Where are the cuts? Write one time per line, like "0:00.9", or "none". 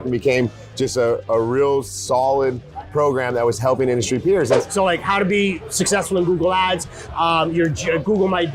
0:04.6